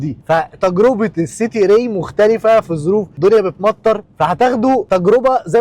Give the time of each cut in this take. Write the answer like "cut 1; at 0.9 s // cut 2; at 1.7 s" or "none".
cut 1; at 3.1 s // cut 2; at 4.8 s